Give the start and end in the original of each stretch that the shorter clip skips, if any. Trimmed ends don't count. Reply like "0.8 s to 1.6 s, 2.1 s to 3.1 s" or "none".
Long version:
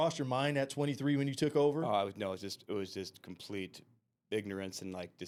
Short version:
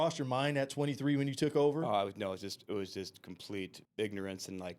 3.8 s to 4.1 s